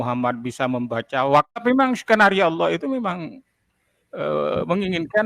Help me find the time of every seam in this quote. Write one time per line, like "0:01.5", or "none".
0:01.6